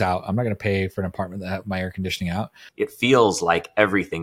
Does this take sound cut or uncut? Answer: cut